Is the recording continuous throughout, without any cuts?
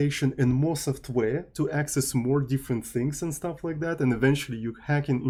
yes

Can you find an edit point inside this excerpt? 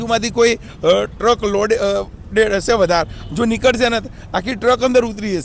no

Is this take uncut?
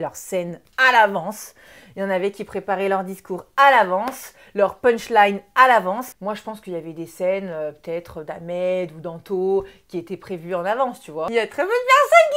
no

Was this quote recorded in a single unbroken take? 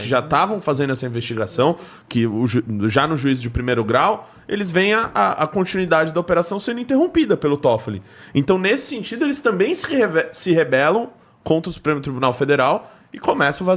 yes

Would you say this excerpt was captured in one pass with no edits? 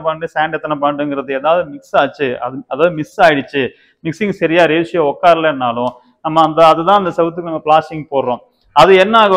yes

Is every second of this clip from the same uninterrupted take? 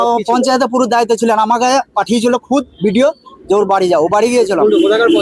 yes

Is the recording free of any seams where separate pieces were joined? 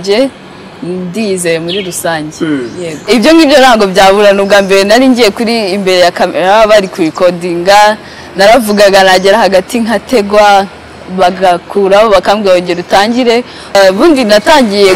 no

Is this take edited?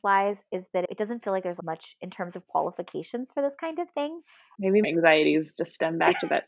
yes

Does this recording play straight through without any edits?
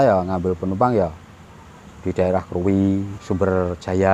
no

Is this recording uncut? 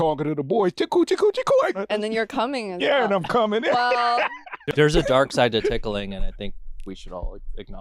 no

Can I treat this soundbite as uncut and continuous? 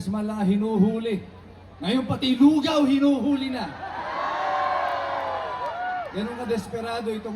yes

